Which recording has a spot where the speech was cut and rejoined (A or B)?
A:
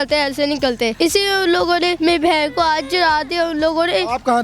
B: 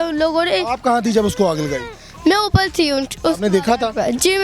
A